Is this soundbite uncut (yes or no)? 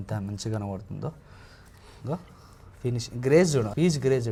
yes